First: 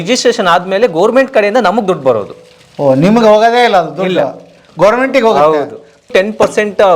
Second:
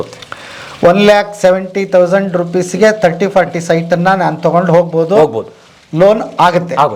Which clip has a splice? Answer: first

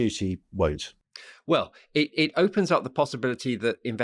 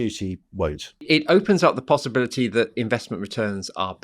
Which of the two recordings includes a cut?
second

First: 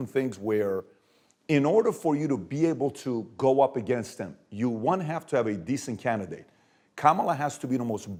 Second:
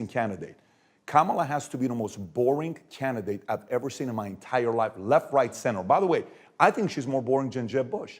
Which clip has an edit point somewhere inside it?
second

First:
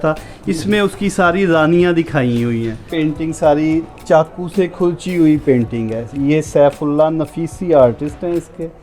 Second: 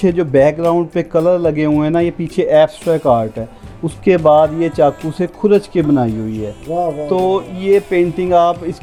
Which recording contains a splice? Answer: first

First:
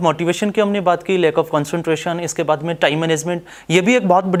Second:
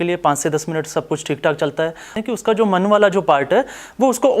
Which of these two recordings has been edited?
second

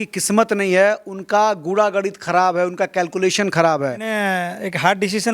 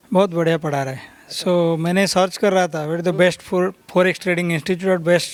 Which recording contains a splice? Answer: first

